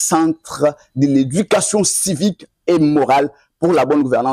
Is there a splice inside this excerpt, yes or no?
no